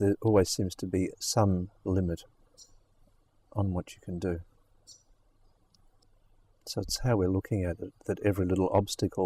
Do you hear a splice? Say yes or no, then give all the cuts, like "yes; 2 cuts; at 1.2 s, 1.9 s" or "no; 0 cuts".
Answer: yes; 1 cut; at 6.0 s